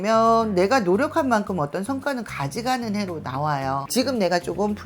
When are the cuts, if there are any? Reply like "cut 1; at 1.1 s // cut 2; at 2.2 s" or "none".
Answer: cut 1; at 3.8 s